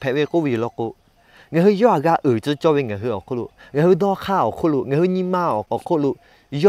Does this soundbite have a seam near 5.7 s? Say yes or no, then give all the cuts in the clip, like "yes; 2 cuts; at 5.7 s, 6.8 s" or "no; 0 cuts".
yes; 1 cut; at 5.7 s